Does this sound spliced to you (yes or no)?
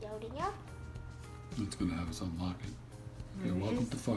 no